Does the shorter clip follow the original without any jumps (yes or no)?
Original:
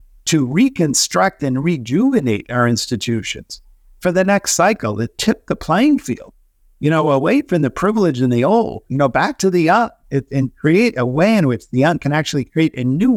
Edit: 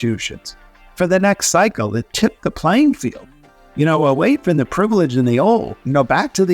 yes